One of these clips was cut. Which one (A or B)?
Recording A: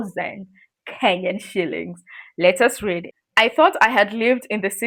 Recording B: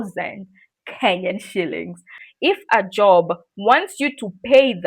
B